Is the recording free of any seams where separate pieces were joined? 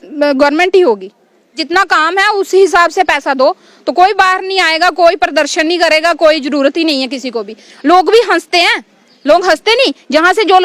no; 1 cut; at 1.6 s

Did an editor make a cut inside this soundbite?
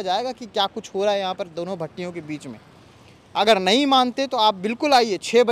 no; 0 cuts

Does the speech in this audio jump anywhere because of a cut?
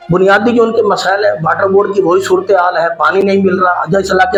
no; 0 cuts

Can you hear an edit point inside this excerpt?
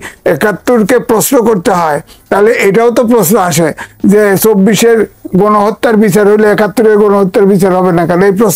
no; 0 cuts

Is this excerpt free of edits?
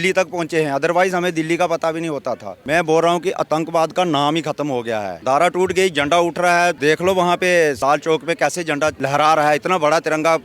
no; 5 cuts; at 2.5 s, 5.1 s, 6.8 s, 7.8 s, 9.0 s

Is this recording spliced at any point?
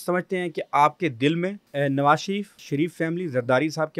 yes; 2 cuts; at 1.6 s, 2.7 s

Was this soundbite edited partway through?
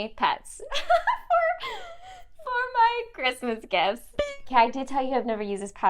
yes; 1 cut; at 4.1 s

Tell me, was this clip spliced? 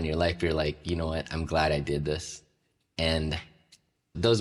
no; 0 cuts

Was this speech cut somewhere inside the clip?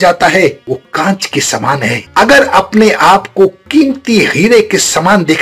yes; 1 cut; at 2.0 s

